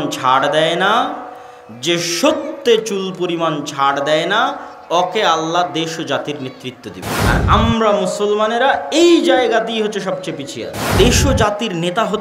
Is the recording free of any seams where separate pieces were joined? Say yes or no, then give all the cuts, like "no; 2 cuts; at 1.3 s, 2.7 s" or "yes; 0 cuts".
no; 2 cuts; at 7.1 s, 10.9 s